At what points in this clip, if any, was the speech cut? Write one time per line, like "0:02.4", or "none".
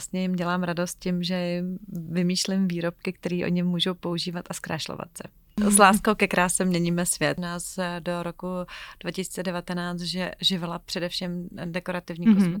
0:05.6
0:07.4